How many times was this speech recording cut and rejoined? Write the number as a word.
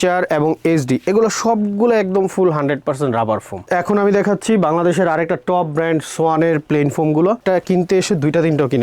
two